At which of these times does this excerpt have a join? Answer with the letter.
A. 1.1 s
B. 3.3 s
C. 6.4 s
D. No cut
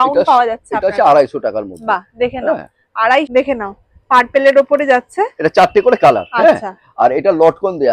B